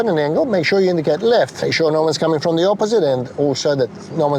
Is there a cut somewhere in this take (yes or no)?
yes